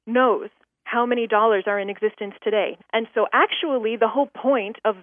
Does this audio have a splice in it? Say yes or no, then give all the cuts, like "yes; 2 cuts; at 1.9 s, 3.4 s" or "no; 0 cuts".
yes; 1 cut; at 2.8 s